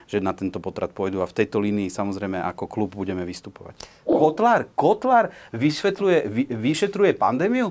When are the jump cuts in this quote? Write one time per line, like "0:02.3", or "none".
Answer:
0:04.1